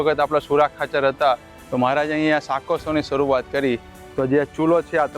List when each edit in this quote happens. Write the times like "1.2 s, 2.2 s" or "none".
1.6 s